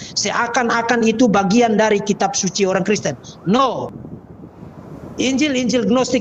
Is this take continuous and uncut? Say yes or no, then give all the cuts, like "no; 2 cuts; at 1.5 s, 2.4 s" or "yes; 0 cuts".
no; 1 cut; at 3.9 s